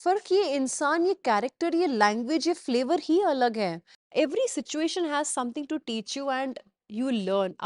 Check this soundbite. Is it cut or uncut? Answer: cut